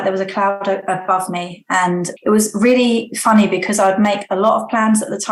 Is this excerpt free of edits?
yes; 0 cuts

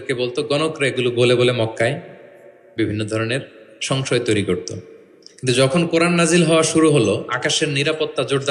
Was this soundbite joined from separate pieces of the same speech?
no; 0 cuts

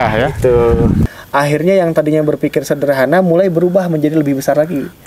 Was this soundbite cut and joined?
yes; 1 cut; at 1.0 s

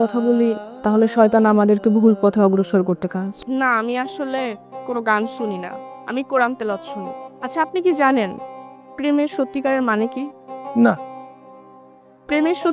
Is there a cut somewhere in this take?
yes; 1 cut; at 3.3 s

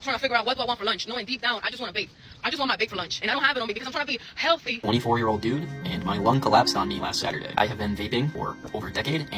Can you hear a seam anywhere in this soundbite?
yes; 3 cuts; at 3.2 s, 4.8 s, 8.3 s

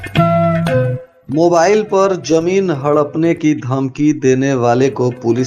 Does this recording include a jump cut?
yes; 1 cut; at 1.1 s

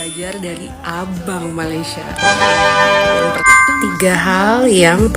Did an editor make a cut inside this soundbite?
yes; 1 cut; at 3.4 s

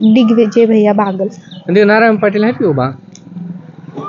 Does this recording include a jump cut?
no; 0 cuts

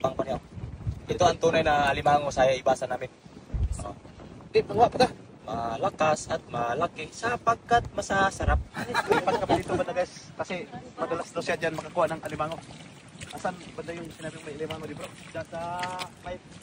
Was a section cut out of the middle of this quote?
no; 0 cuts

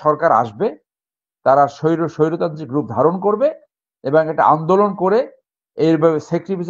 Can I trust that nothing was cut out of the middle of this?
yes; 0 cuts

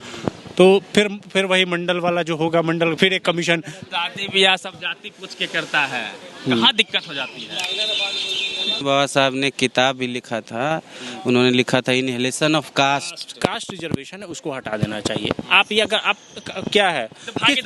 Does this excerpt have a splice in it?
yes; 3 cuts; at 3.8 s, 8.8 s, 13.4 s

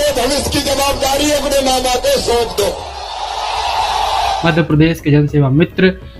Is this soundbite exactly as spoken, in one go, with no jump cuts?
no; 1 cut; at 4.4 s

